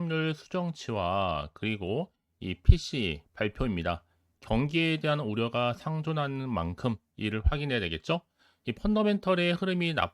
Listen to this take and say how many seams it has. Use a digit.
1